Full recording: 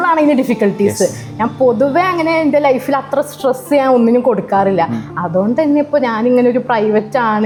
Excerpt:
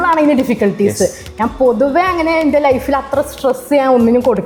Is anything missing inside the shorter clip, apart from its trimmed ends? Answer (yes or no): no